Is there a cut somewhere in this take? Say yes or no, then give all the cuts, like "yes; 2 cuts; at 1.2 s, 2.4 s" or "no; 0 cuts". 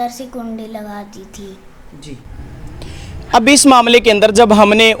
no; 0 cuts